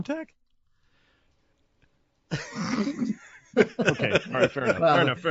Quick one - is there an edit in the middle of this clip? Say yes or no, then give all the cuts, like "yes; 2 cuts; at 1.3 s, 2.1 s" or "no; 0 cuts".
no; 0 cuts